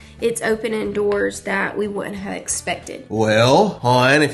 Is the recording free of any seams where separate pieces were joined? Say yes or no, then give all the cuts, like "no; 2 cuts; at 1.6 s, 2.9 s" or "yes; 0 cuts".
yes; 0 cuts